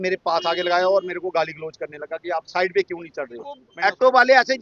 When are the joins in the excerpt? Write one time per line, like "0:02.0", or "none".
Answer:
0:03.7